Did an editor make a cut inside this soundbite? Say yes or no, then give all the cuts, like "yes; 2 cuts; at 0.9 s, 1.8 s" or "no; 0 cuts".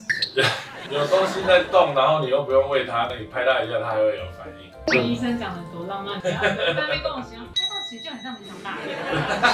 no; 0 cuts